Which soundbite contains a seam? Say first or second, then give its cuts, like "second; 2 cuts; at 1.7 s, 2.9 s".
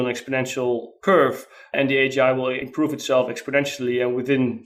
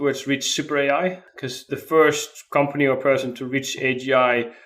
second; 1 cut; at 1.3 s